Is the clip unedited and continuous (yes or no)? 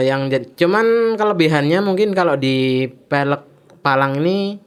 yes